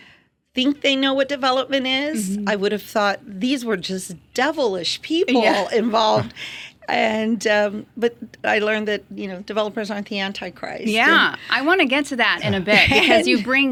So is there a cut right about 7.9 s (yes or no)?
no